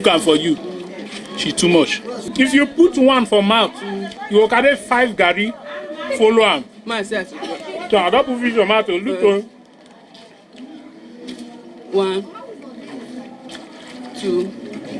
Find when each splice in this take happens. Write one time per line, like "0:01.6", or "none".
0:02.2